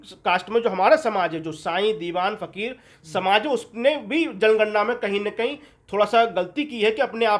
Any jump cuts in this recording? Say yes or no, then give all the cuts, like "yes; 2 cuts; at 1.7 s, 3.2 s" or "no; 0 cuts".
no; 0 cuts